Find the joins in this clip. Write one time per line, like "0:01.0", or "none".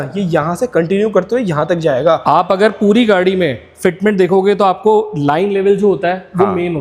none